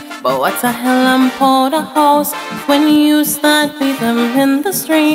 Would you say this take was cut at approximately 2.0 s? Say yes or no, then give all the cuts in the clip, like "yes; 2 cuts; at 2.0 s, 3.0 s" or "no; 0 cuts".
no; 0 cuts